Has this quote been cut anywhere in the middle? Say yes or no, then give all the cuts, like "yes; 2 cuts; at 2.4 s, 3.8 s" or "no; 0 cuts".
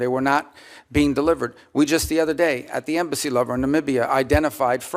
no; 0 cuts